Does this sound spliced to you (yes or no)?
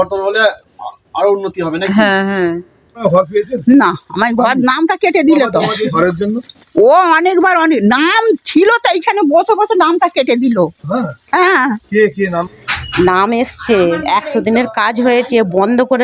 yes